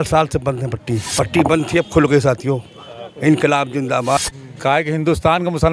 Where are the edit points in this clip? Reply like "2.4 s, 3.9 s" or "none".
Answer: 1.1 s, 4.3 s

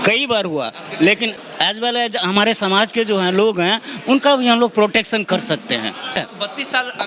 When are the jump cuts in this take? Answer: 1.4 s, 6.2 s

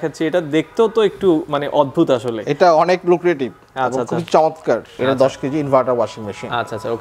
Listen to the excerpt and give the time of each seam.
4.9 s

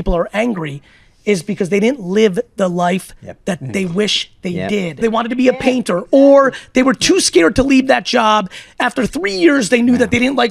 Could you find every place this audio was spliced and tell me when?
5.0 s

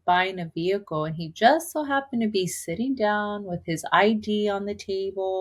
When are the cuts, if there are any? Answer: none

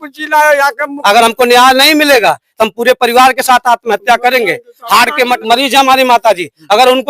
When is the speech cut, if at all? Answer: 0.9 s, 5.4 s

